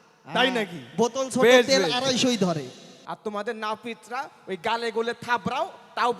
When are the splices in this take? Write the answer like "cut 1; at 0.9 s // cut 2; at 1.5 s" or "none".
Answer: cut 1; at 2.9 s